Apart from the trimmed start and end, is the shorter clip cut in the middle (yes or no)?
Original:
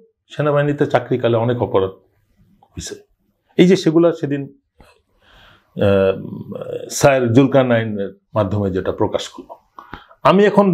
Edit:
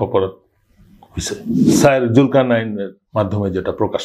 yes